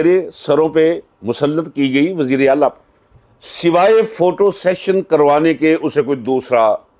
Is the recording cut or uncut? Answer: uncut